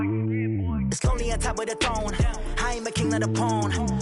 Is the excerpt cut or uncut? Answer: cut